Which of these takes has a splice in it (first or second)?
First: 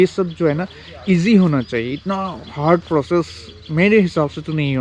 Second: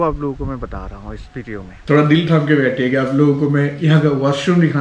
second